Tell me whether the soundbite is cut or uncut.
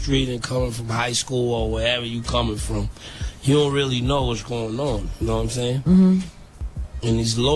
cut